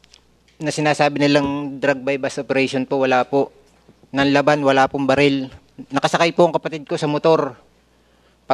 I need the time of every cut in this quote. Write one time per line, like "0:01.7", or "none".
none